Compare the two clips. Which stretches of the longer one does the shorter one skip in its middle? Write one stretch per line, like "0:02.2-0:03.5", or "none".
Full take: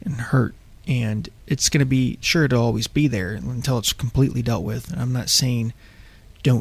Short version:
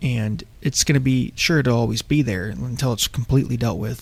none